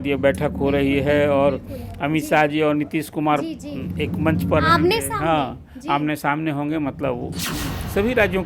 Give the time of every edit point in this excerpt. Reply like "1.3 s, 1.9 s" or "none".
7.5 s